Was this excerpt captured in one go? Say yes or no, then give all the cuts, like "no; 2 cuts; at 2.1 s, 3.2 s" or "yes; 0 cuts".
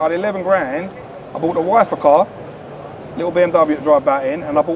yes; 0 cuts